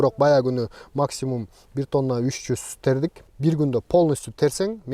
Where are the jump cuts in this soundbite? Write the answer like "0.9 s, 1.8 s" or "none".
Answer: 3.3 s